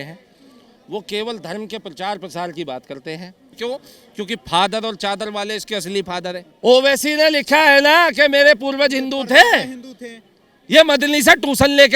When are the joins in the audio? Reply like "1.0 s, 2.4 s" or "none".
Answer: 3.5 s, 6.5 s